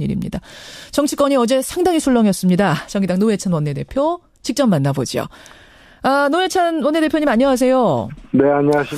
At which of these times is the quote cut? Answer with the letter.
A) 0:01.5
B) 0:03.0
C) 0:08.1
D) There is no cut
A